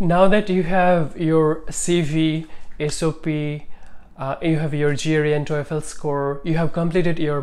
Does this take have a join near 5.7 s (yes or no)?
no